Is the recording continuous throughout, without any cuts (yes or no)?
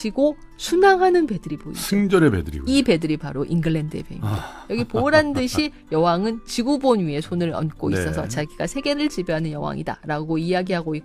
yes